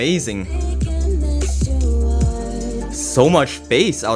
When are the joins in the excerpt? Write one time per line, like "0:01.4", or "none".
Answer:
0:03.0